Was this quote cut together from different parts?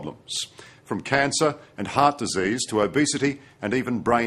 yes; 1 cut; at 1.9 s

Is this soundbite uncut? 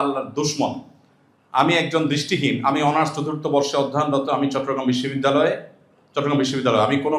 yes; 0 cuts

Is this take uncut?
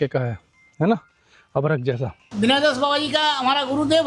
no; 1 cut; at 2.3 s

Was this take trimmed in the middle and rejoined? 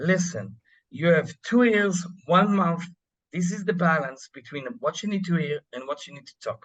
no; 0 cuts

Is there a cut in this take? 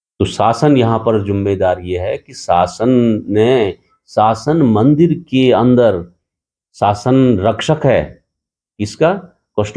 no; 0 cuts

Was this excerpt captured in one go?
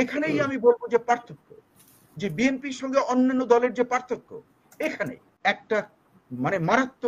no; 1 cut; at 5.3 s

